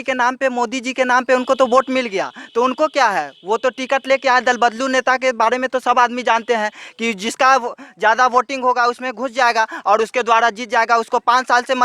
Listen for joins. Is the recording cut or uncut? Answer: uncut